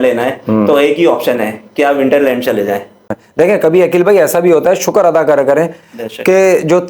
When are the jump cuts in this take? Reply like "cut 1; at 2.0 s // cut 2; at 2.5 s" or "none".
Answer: cut 1; at 3.1 s